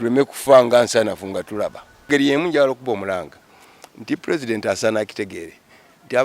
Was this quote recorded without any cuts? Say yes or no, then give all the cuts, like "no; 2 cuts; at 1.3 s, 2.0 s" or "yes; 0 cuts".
no; 1 cut; at 2.1 s